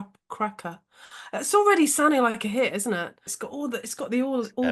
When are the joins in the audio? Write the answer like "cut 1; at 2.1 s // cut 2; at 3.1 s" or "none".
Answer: cut 1; at 3.3 s